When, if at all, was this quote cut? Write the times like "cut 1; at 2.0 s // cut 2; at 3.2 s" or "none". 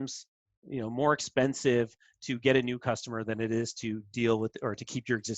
none